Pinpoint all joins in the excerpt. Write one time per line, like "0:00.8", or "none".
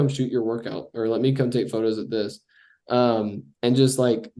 none